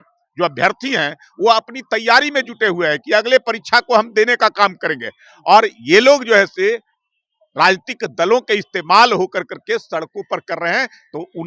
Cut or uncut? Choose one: uncut